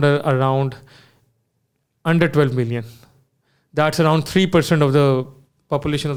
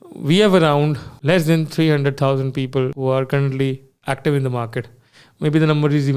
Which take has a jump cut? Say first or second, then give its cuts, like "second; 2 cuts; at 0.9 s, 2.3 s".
second; 2 cuts; at 1.1 s, 3.0 s